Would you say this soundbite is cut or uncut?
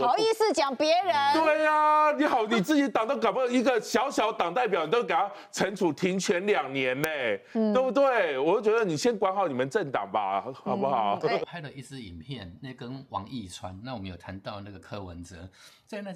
cut